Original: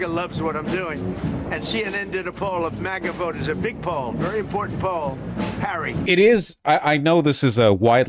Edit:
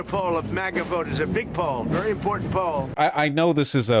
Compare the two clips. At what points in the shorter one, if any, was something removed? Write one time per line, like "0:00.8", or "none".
0:02.9